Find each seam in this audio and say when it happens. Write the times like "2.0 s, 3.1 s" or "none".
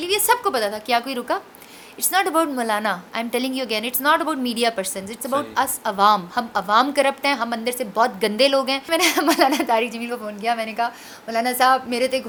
none